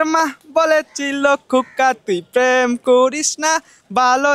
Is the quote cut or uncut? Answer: uncut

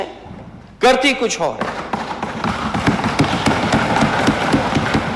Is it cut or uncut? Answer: uncut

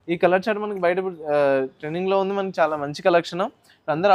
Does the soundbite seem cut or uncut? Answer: uncut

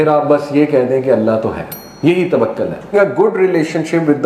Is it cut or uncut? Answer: cut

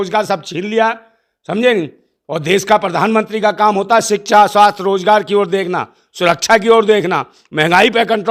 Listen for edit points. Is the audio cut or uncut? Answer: uncut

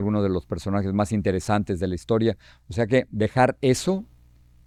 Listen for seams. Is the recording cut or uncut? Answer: uncut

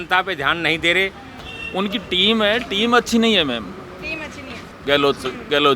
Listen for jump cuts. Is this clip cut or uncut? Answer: cut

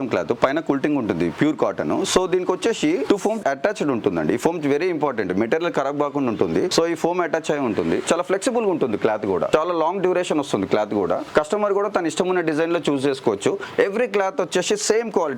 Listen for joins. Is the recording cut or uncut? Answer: uncut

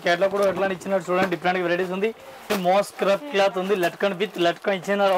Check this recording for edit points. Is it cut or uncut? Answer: cut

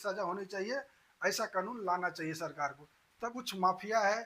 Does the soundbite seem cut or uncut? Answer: cut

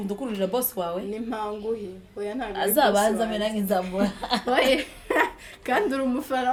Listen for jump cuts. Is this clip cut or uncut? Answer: uncut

